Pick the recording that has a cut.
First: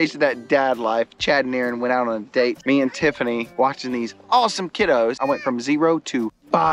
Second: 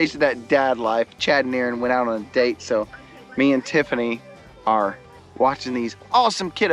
first; 3 cuts; at 2.6 s, 3.5 s, 5.2 s

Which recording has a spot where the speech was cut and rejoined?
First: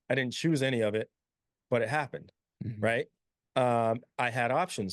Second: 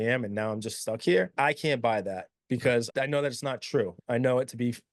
second; 2 cuts; at 1.3 s, 2.9 s

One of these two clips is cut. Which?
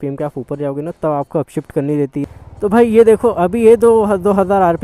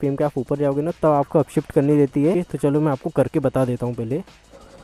first; 1 cut; at 2.2 s

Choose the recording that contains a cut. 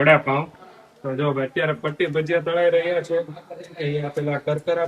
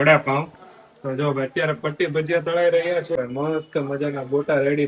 second; 1 cut; at 3.2 s

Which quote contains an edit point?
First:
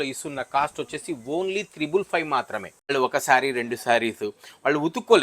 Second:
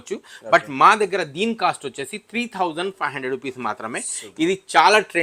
first; 1 cut; at 2.9 s

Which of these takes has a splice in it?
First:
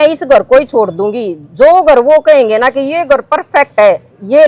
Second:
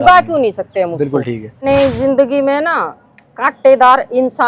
second; 1 cut; at 1.6 s

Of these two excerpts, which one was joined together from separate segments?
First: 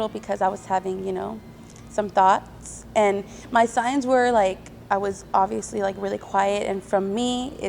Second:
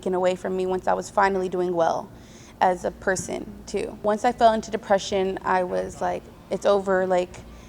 second; 1 cut; at 4.0 s

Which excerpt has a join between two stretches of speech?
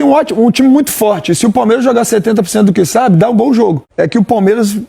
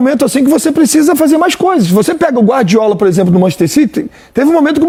first; 1 cut; at 3.8 s

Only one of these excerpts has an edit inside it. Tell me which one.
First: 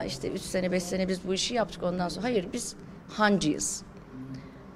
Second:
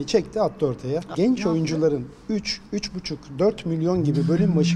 second; 1 cut; at 1.1 s

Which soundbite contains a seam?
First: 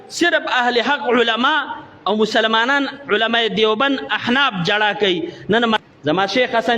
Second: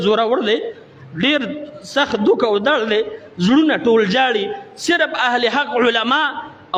first; 1 cut; at 5.8 s

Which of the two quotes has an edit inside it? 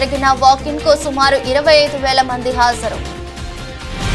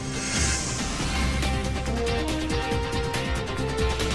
second; 1 cut; at 3.2 s

